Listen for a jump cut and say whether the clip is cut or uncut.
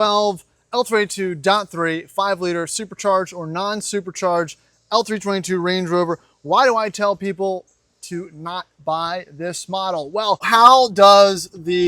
cut